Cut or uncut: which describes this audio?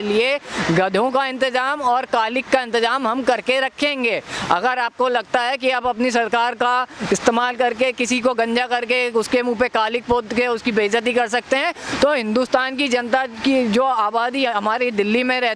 uncut